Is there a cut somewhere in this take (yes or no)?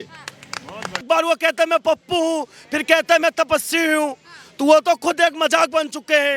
yes